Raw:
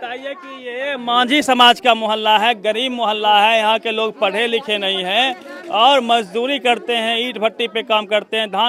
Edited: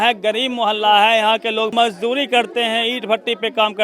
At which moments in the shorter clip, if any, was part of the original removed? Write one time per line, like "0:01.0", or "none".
0:01.7